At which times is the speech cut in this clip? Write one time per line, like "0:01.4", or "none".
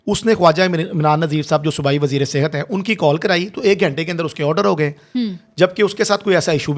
none